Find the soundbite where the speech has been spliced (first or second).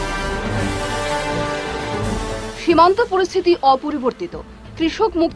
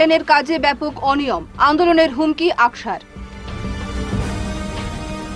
first